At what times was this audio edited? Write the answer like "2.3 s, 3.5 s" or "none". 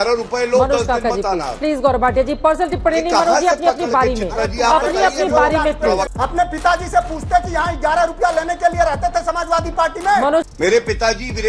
6.1 s, 10.5 s